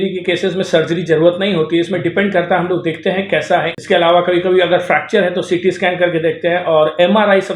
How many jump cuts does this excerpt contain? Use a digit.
1